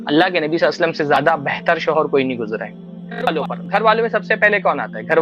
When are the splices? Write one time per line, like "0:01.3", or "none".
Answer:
0:03.4